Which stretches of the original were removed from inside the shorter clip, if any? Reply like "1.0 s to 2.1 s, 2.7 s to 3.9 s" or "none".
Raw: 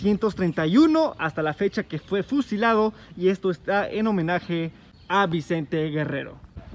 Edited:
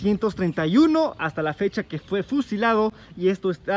none